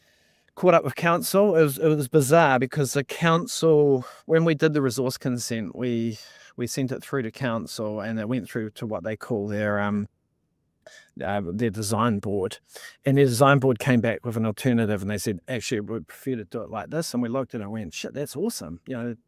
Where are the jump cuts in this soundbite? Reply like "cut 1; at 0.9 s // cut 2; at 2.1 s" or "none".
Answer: none

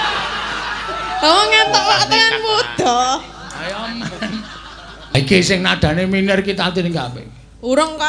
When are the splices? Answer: cut 1; at 5.1 s

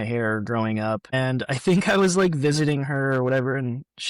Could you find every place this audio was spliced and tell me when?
cut 1; at 1.1 s

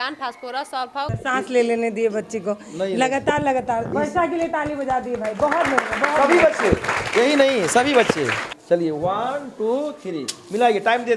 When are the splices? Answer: cut 1; at 1.1 s // cut 2; at 8.5 s

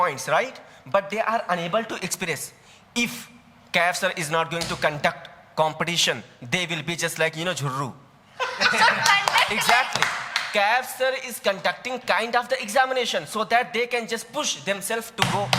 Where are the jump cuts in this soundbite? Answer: none

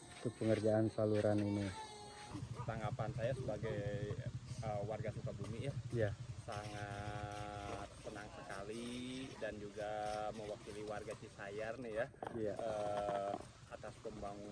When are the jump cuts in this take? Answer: cut 1; at 2.4 s

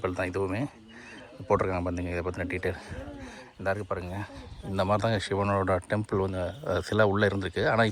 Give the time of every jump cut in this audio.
none

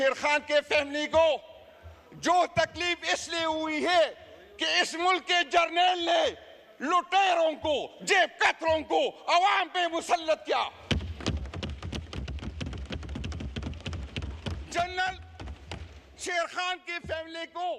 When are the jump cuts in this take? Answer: none

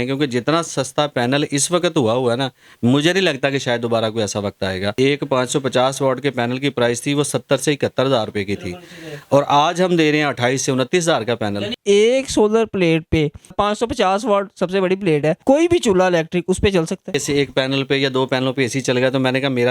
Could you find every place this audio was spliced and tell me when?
cut 1; at 4.9 s // cut 2; at 11.8 s // cut 3; at 17.2 s

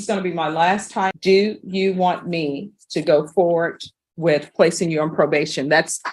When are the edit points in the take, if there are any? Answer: cut 1; at 1.2 s

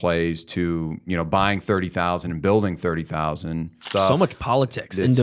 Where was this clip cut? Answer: cut 1; at 3.8 s

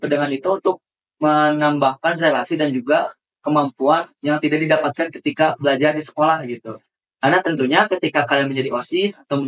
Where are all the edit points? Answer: none

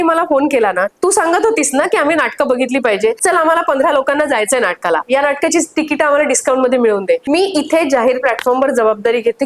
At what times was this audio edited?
cut 1; at 0.9 s // cut 2; at 3.2 s // cut 3; at 7.2 s

